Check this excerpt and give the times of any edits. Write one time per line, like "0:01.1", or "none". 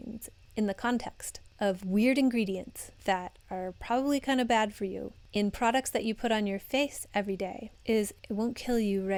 none